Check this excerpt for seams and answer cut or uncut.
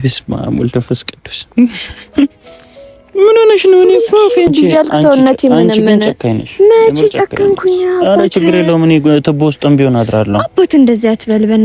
cut